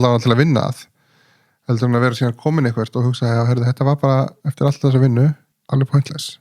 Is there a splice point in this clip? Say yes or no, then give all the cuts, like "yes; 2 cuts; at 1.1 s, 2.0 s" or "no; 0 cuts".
yes; 1 cut; at 5.5 s